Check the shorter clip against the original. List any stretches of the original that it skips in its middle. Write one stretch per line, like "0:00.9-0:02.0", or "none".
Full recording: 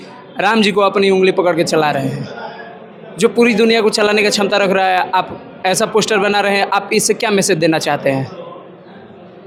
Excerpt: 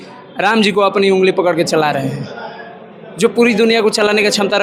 none